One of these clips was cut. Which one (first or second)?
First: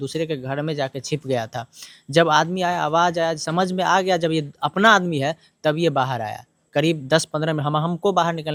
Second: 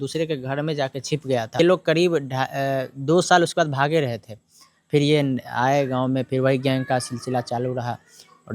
second